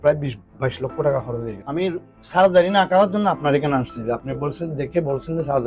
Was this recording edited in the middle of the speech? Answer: yes; 1 cut; at 1.5 s

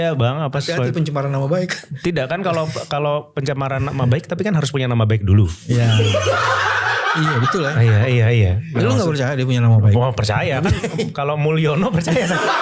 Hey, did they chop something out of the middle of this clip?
no; 0 cuts

